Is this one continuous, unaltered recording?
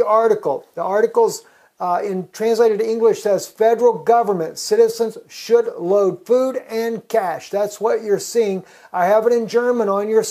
no; 1 cut; at 3.9 s

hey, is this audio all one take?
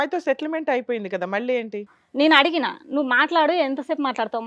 no; 1 cut; at 2.0 s

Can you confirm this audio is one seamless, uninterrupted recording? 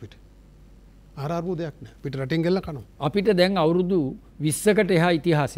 no; 1 cut; at 2.8 s

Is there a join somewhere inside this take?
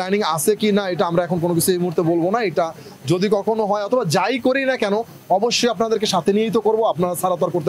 no; 0 cuts

